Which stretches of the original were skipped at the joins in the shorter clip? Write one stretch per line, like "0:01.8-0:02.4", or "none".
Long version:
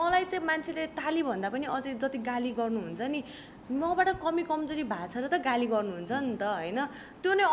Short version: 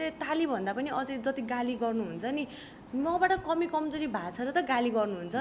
none